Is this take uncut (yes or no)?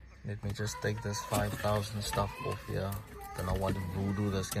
yes